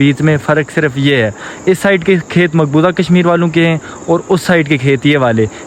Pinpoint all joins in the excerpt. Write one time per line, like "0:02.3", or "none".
none